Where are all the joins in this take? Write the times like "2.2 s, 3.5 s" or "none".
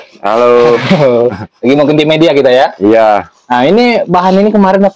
none